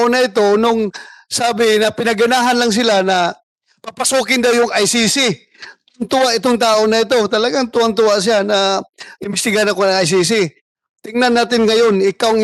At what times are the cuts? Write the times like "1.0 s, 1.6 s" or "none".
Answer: none